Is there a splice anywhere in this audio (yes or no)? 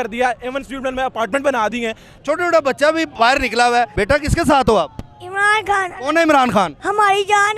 yes